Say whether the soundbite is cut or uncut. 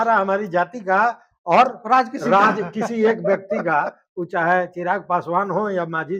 uncut